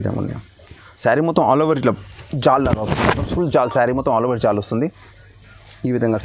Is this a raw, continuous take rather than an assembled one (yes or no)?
no